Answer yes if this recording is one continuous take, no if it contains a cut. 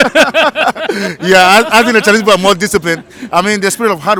yes